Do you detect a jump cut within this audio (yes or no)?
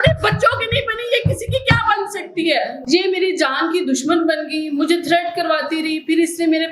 yes